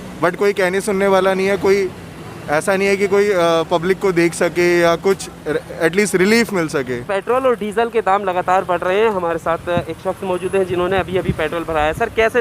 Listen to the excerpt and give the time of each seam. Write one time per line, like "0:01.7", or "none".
0:07.0